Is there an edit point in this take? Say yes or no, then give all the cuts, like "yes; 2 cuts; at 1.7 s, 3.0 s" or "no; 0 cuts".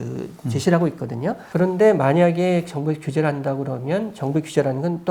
yes; 1 cut; at 1.4 s